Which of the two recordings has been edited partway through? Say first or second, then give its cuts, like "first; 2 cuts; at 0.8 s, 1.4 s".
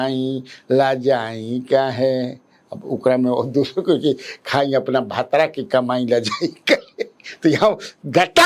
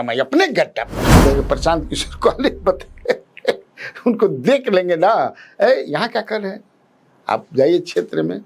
second; 1 cut; at 1.0 s